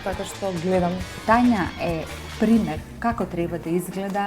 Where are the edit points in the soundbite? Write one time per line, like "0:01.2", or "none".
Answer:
0:01.1